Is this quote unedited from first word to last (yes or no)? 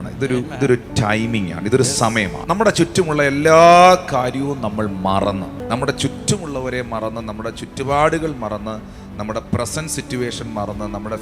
no